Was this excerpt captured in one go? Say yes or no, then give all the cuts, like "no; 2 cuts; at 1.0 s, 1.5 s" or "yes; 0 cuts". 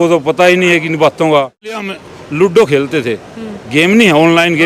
no; 1 cut; at 1.9 s